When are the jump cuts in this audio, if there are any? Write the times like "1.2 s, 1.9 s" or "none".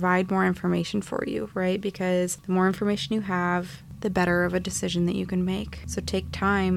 2.4 s, 3.8 s, 5.8 s